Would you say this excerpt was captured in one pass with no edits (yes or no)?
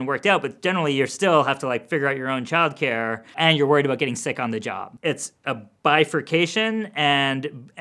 no